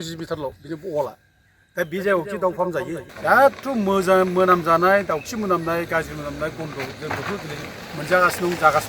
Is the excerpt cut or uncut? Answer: cut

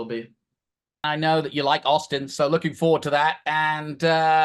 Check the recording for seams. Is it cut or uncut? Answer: cut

